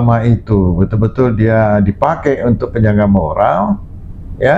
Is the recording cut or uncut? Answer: uncut